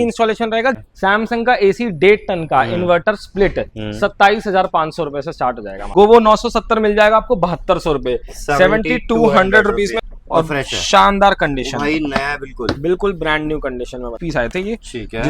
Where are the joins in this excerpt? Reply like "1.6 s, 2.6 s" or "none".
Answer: 0.8 s, 5.7 s, 10.0 s, 14.2 s